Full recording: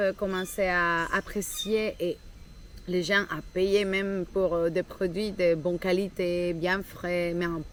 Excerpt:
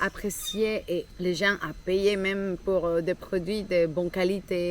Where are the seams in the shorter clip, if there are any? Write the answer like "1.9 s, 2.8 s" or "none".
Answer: 1.1 s